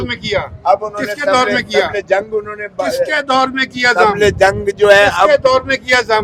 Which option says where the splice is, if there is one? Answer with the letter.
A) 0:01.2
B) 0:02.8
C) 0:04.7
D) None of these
D